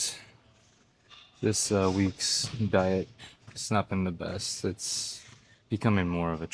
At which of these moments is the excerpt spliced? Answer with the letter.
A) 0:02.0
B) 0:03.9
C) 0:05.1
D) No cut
D